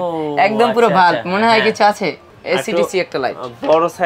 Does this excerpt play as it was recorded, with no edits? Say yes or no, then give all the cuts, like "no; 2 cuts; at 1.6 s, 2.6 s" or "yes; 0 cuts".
no; 1 cut; at 2.3 s